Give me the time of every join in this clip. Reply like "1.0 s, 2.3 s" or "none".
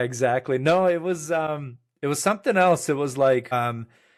none